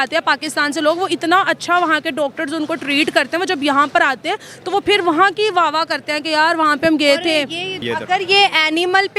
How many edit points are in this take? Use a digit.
1